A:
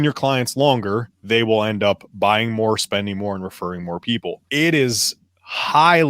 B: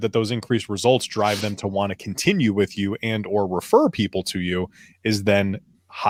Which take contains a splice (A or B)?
A